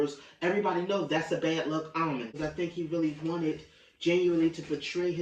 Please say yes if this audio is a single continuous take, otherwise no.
no